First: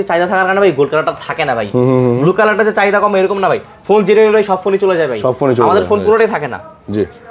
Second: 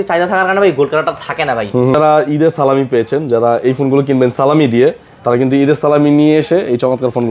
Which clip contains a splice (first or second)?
second